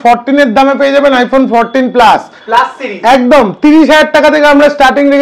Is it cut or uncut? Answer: uncut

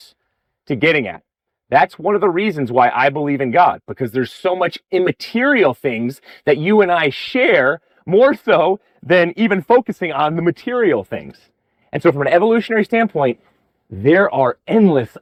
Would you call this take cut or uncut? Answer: uncut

